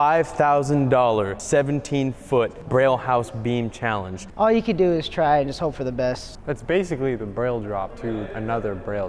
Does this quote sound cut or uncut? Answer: cut